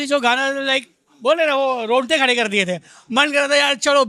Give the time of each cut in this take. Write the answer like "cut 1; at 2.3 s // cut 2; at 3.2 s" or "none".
none